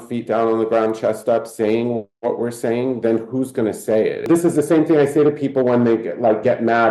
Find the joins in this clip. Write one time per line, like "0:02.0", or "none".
0:04.3